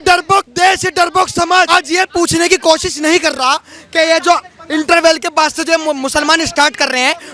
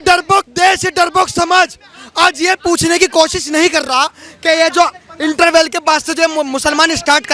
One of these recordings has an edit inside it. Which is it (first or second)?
first